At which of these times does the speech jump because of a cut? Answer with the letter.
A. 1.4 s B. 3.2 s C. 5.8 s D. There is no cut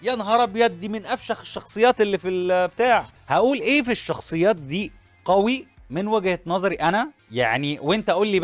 B